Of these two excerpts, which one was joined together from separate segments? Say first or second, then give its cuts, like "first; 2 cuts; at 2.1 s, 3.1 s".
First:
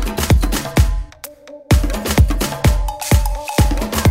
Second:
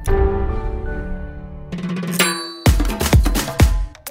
second; 1 cut; at 1.7 s